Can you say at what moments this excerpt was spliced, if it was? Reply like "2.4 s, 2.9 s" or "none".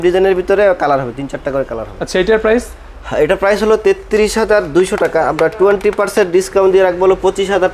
none